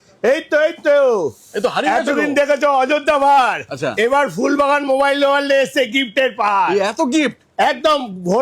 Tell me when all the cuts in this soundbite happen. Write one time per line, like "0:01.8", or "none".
none